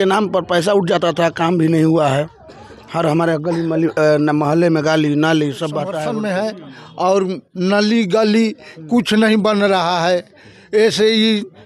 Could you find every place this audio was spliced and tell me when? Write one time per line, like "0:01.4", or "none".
0:06.0